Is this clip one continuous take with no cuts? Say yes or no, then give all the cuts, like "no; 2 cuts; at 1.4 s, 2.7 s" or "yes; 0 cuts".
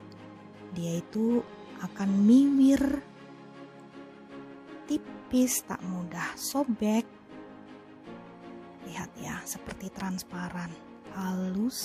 yes; 0 cuts